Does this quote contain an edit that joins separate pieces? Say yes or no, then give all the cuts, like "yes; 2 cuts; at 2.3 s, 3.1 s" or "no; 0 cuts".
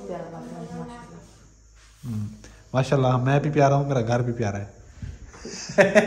no; 0 cuts